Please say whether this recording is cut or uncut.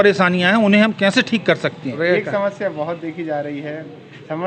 cut